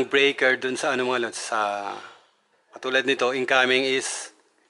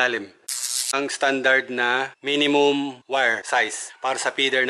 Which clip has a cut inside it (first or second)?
second